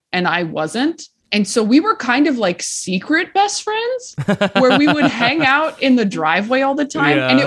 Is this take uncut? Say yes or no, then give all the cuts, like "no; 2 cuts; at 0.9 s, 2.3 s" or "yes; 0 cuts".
no; 1 cut; at 1.1 s